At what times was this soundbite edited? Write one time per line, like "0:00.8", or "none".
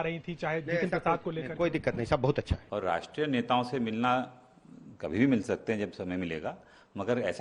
0:02.6